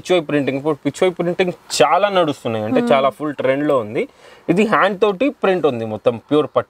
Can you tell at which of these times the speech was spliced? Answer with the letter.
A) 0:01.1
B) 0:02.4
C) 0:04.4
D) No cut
D